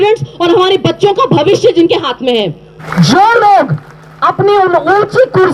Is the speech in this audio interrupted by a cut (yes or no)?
yes